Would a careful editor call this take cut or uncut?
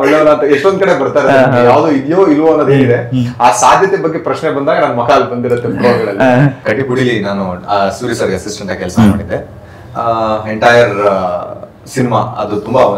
cut